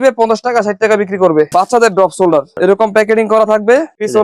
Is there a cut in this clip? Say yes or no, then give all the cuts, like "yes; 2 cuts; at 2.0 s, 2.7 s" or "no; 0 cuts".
yes; 1 cut; at 1.5 s